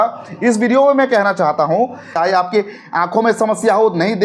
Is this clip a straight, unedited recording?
no; 1 cut; at 2.0 s

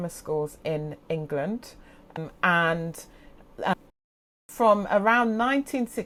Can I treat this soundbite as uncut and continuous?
yes; 0 cuts

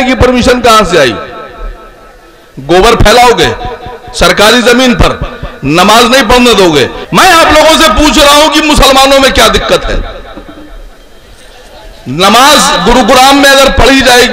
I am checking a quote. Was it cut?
yes; 1 cut; at 7.0 s

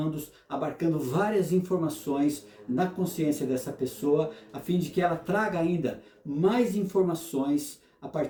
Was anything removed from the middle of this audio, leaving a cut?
no; 0 cuts

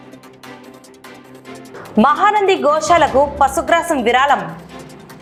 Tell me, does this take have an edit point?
no; 0 cuts

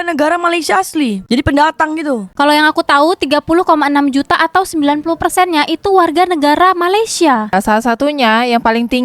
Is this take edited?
yes; 1 cut; at 7.5 s

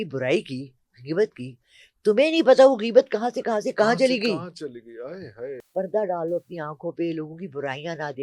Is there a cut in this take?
yes; 1 cut; at 5.6 s

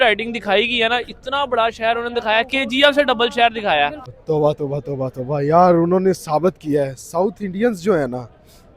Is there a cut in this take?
yes; 1 cut; at 4.1 s

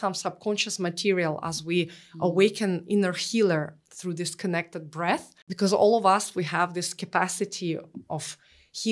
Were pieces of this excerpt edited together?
yes; 1 cut; at 5.5 s

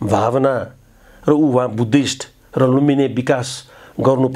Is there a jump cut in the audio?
no; 0 cuts

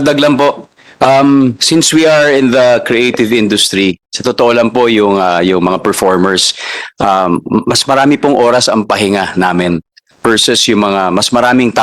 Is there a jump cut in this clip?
no; 0 cuts

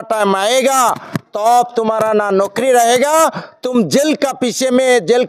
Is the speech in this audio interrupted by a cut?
no; 0 cuts

